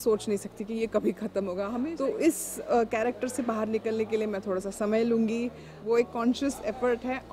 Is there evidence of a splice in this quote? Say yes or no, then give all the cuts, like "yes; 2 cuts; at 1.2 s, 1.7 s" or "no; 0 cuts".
yes; 2 cuts; at 1.7 s, 5.7 s